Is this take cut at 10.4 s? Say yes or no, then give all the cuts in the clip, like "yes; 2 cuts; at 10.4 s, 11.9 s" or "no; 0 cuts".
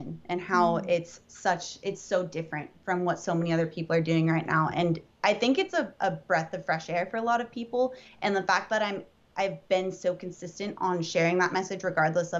no; 0 cuts